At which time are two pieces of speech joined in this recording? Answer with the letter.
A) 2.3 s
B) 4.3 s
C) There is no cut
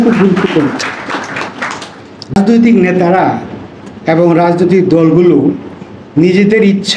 A